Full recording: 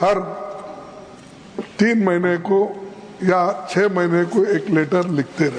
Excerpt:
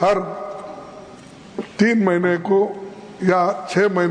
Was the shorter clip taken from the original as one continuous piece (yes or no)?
yes